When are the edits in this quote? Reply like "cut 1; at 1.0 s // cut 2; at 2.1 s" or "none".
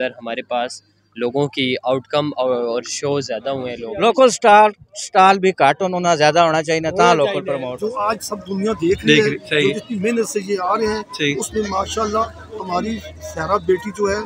cut 1; at 3.8 s // cut 2; at 7.7 s